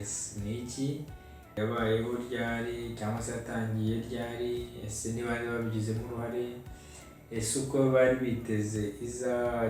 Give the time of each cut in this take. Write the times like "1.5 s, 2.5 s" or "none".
1.6 s